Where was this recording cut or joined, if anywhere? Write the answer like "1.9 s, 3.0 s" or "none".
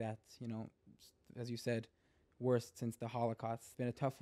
none